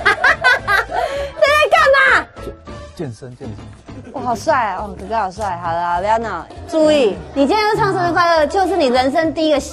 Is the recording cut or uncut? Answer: cut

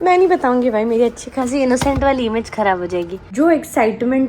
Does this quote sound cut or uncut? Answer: cut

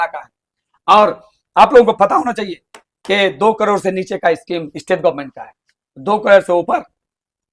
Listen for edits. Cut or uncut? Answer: uncut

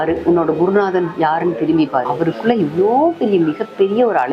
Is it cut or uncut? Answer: cut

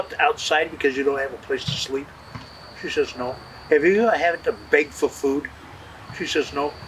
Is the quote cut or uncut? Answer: uncut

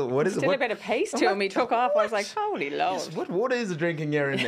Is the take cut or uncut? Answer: uncut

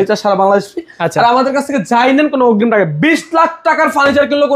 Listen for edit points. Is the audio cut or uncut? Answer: uncut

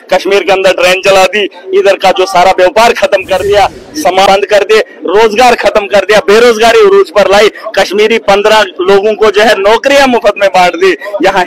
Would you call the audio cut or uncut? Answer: cut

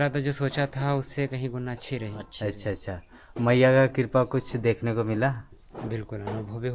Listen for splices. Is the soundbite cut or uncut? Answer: uncut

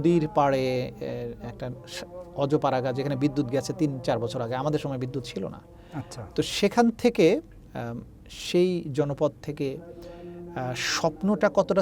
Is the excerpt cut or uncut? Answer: uncut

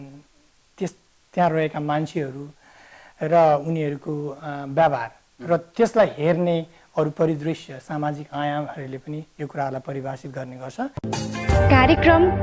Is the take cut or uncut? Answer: cut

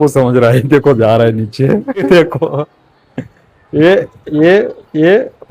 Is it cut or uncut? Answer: cut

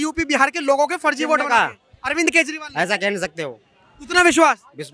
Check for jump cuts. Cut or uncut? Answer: uncut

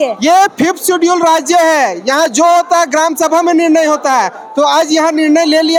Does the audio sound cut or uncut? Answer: uncut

